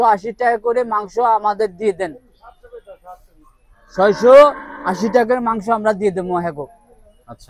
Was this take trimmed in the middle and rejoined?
no; 0 cuts

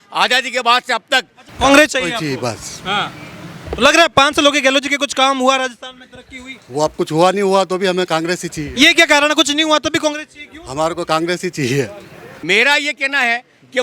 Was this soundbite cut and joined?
yes; 2 cuts; at 1.4 s, 12.3 s

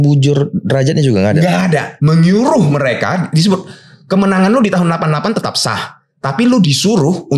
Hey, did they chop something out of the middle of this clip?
yes; 1 cut; at 1.9 s

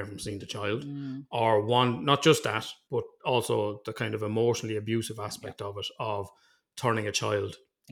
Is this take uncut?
no; 1 cut; at 2.7 s

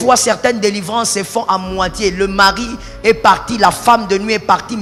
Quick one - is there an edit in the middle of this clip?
no; 0 cuts

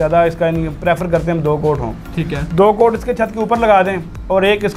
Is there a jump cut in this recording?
no; 0 cuts

